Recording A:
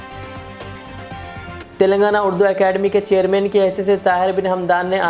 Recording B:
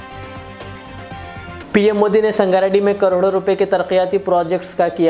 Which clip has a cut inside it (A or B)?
B